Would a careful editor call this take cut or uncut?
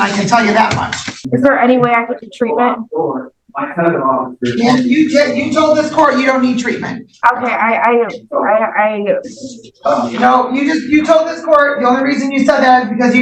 cut